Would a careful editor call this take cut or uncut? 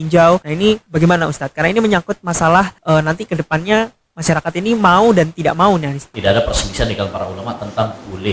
cut